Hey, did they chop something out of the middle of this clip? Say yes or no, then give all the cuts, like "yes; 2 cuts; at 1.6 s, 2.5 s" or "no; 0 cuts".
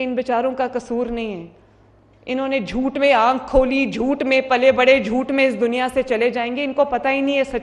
no; 0 cuts